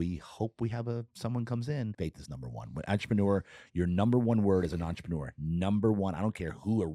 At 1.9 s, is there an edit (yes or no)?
yes